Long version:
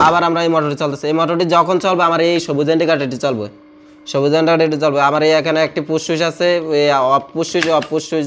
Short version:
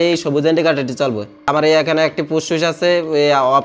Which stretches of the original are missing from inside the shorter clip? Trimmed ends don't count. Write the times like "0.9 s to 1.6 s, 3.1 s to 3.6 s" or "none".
3.7 s to 5.1 s